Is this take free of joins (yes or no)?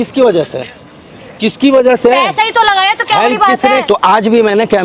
no